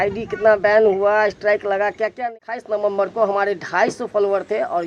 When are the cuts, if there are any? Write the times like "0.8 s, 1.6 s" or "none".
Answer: 2.2 s

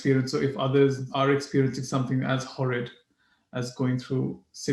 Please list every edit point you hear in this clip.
1.0 s

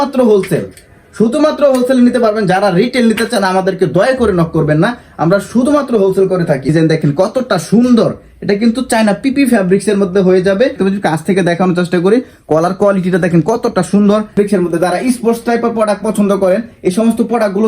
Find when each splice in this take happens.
6.7 s, 10.8 s, 14.3 s

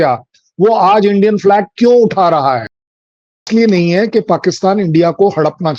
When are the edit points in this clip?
3.4 s

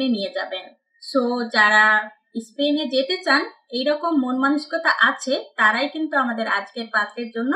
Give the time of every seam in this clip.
none

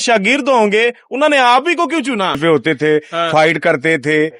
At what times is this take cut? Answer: 2.4 s

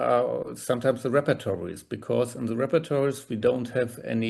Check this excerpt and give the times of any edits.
none

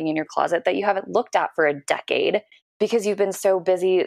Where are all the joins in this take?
2.6 s

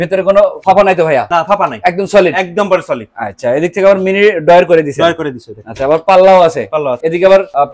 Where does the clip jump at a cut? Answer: none

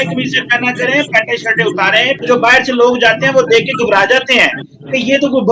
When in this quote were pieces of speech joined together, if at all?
2.2 s

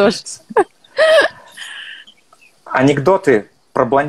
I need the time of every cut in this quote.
2.0 s

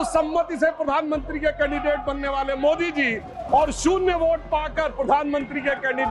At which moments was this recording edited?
none

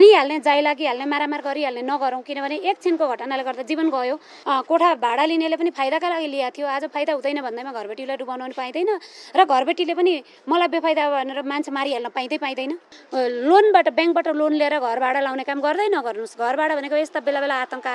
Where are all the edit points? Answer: 4.3 s, 12.9 s

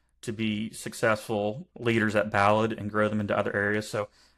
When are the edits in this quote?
1.7 s

